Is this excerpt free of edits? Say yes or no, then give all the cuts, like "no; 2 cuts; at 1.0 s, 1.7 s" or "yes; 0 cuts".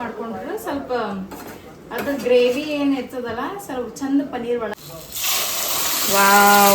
no; 1 cut; at 4.7 s